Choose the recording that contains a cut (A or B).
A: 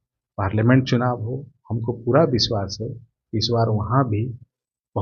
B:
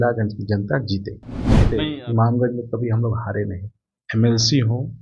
B